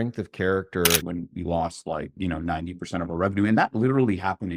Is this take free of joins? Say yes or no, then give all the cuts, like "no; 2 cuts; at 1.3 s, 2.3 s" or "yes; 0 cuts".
no; 1 cut; at 1.0 s